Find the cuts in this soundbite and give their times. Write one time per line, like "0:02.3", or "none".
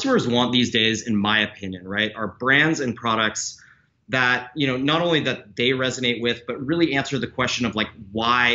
none